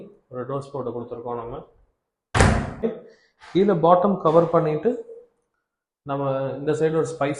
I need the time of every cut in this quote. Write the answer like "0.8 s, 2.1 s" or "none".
2.8 s